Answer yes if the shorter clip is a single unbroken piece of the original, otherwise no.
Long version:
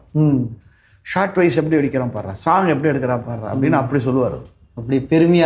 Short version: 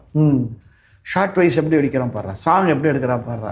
yes